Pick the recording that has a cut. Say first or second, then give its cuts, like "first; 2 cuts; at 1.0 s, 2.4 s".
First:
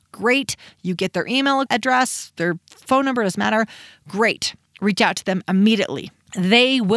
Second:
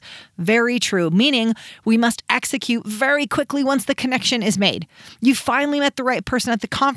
first; 1 cut; at 1.7 s